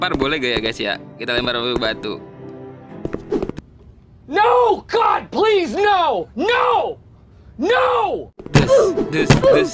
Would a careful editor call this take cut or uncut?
uncut